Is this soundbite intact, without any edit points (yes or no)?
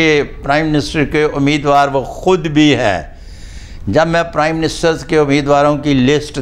yes